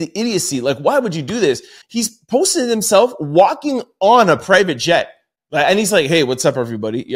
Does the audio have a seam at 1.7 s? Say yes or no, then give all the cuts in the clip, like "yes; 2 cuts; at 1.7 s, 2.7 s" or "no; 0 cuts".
yes; 1 cut; at 1.7 s